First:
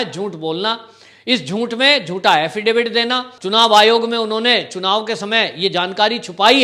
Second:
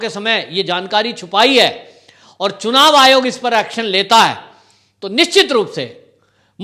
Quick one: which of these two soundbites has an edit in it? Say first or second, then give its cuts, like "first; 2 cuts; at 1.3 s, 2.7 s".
first; 1 cut; at 3.3 s